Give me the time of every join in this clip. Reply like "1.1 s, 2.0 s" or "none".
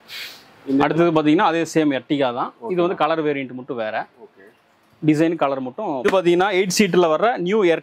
6.0 s

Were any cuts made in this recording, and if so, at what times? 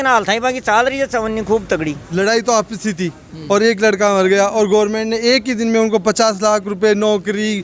2.1 s

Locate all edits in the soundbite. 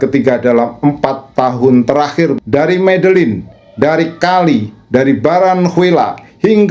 2.4 s

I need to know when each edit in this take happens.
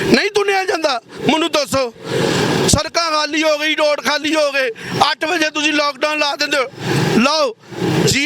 none

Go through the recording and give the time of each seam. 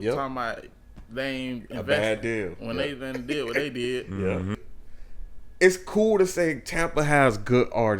4.6 s

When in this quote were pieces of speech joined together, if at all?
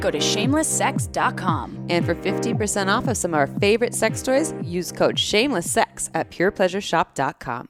none

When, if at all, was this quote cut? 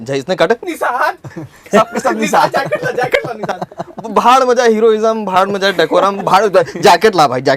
none

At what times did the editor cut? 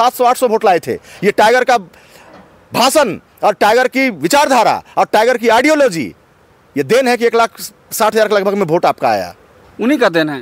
none

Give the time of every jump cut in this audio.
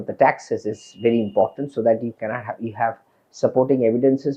none

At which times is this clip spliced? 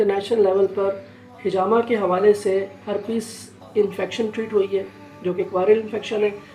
none

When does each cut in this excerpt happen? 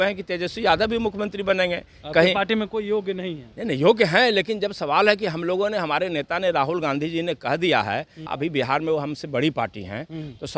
8.3 s

